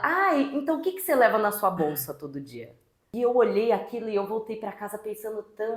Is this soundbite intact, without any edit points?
no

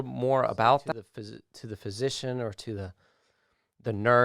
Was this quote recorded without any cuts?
no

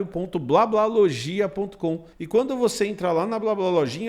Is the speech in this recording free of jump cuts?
no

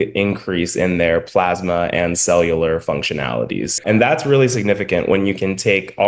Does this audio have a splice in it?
yes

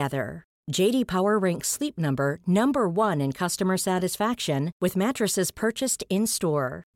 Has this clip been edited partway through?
no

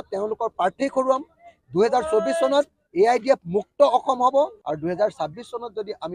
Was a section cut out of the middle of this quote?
yes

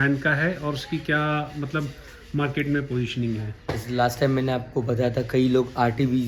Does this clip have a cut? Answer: no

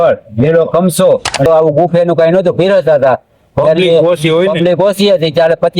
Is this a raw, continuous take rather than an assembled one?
no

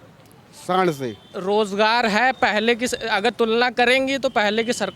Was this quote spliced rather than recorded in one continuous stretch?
yes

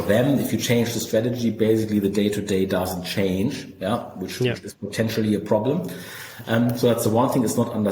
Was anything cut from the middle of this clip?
no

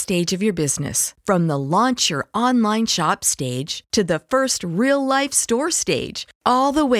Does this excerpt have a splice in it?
no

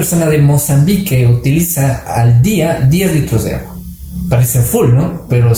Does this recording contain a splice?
no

